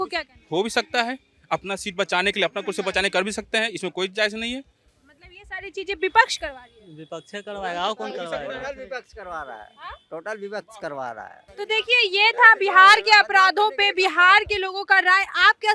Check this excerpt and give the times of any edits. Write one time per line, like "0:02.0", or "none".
none